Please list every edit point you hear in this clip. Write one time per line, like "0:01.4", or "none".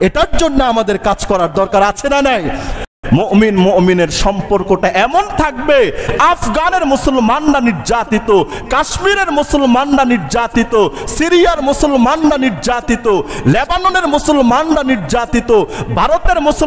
0:02.9
0:06.0

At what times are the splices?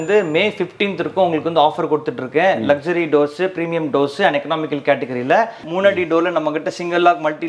0:05.6

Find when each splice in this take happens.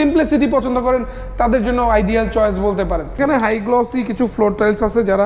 0:03.2

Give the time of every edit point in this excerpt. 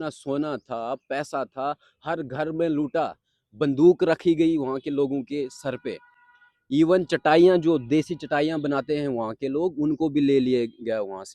none

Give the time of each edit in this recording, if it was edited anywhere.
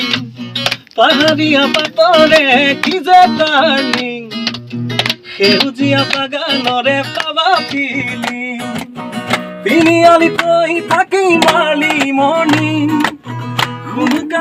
none

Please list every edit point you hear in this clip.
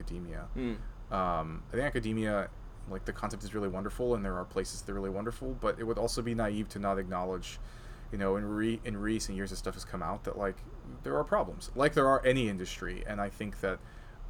none

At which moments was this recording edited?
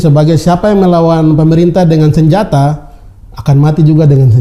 none

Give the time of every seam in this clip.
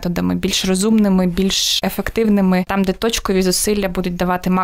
0:01.7
0:02.7

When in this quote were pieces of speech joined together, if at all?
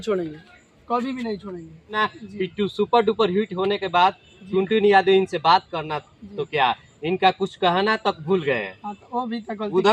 0:02.0

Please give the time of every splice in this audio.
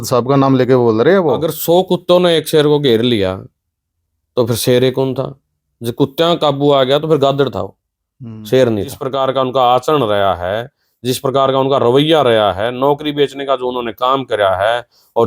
0:01.5
0:09.0

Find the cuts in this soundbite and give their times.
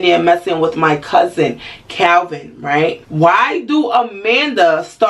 0:03.0

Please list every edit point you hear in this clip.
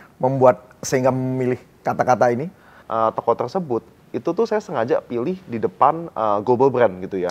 0:02.8

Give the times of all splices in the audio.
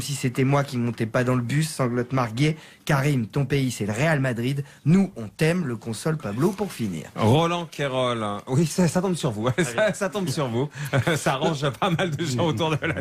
0:07.3

